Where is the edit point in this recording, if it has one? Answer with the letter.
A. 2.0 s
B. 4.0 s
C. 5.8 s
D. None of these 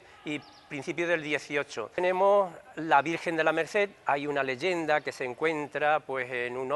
A